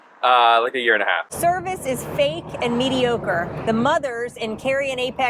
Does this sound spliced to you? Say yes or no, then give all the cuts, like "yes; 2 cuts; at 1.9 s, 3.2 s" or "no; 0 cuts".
yes; 1 cut; at 1.3 s